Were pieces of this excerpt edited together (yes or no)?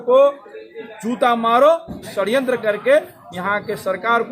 yes